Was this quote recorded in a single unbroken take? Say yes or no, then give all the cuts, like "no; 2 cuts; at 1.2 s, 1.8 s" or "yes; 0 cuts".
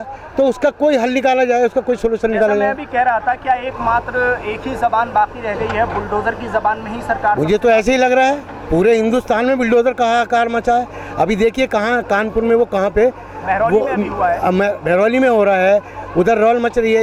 yes; 0 cuts